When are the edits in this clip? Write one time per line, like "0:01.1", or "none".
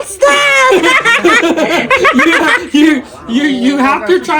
none